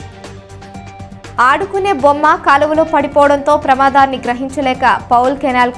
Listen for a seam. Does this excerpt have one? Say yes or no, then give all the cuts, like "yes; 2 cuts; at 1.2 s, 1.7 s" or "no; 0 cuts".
yes; 1 cut; at 1.3 s